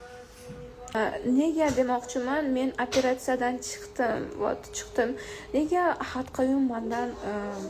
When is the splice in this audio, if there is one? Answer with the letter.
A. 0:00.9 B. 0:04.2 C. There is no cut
A